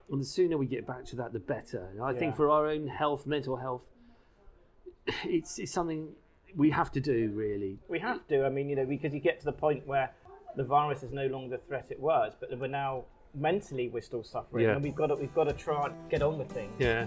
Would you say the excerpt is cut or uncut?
cut